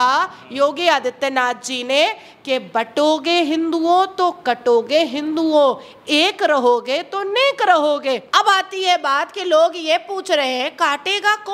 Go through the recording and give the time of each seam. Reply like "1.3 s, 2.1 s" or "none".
8.2 s